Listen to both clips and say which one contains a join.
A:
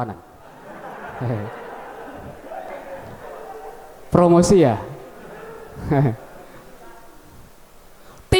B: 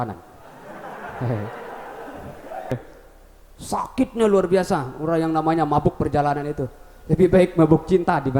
B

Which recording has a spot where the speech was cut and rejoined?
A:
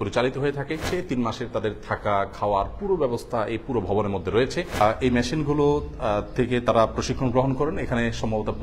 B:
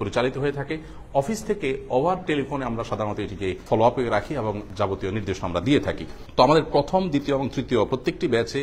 A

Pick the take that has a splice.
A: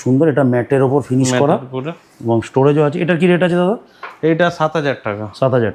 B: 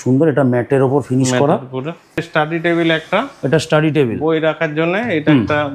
B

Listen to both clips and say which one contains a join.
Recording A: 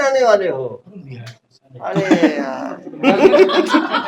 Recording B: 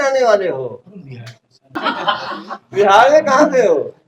B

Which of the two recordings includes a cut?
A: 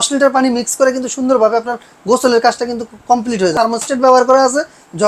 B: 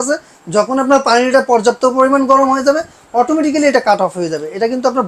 A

